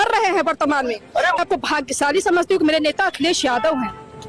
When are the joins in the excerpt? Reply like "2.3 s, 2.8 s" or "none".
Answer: 1.4 s